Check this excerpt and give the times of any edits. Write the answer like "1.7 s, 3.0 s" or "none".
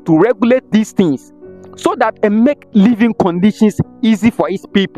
none